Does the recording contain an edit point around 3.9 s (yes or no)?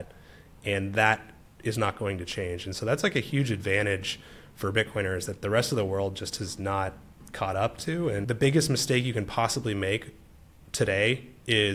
no